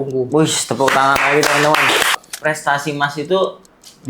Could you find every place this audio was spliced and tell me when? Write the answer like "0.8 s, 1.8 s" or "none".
2.2 s